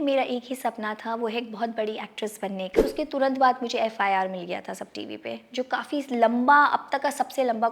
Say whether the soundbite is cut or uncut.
cut